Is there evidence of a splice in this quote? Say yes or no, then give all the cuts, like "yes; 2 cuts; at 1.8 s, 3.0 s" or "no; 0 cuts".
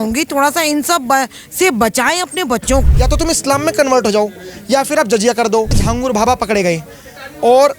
yes; 2 cuts; at 3.0 s, 5.8 s